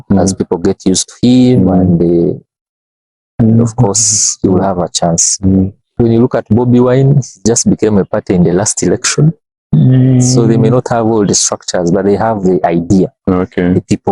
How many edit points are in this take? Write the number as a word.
one